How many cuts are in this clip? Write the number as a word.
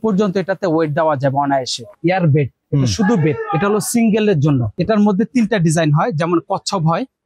two